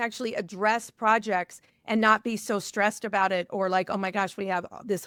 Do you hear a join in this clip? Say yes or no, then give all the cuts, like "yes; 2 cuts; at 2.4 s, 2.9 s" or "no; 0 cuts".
no; 0 cuts